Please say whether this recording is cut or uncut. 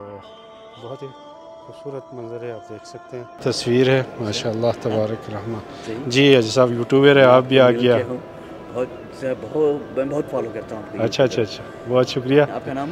cut